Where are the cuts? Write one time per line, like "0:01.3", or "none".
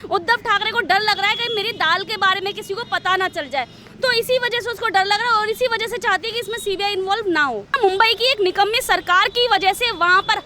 0:07.7